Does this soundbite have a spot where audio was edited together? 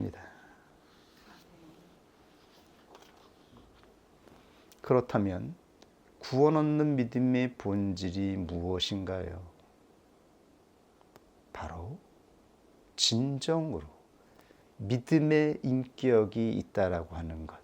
yes; 1 cut; at 11.2 s

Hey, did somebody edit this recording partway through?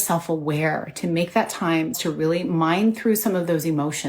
yes; 1 cut; at 2.0 s

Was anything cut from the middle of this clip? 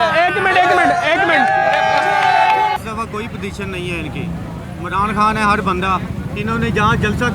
yes; 1 cut; at 2.8 s

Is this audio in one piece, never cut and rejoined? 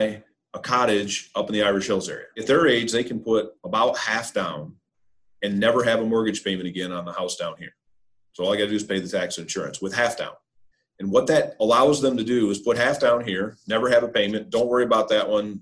no; 1 cut; at 2.3 s

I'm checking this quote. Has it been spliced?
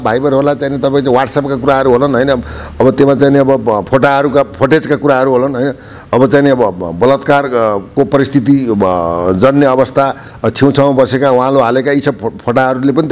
no; 0 cuts

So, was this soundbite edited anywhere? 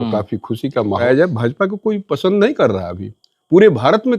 yes; 1 cut; at 1.0 s

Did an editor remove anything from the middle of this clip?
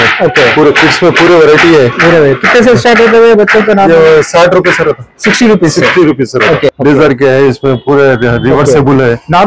yes; 1 cut; at 6.7 s

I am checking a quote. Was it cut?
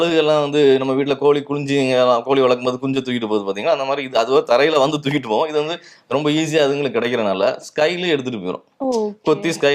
no; 0 cuts

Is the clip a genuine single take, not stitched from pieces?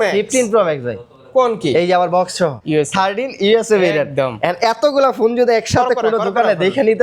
no; 1 cut; at 2.6 s

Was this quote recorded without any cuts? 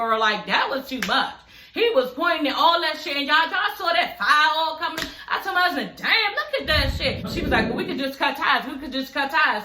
no; 1 cut; at 7.2 s

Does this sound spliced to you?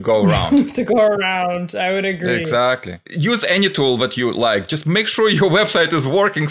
no; 0 cuts

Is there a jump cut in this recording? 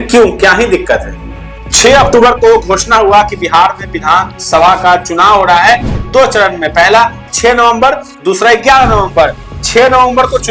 yes; 1 cut; at 1.6 s

